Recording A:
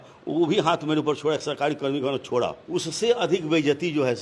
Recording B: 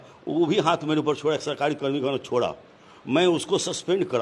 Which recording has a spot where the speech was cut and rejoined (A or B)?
A